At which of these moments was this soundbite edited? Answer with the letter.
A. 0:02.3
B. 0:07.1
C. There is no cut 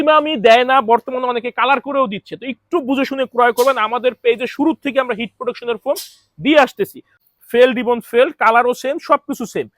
B